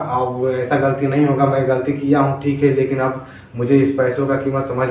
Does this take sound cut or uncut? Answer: uncut